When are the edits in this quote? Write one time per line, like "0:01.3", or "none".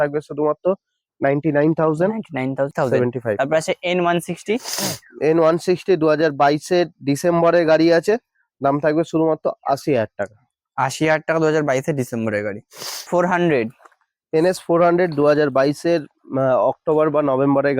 0:02.7
0:13.0